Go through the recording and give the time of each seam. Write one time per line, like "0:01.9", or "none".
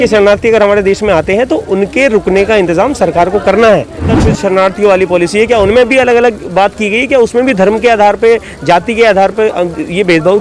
0:04.2